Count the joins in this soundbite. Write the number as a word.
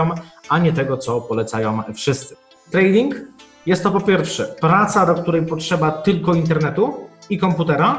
one